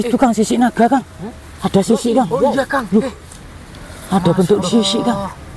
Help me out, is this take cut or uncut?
uncut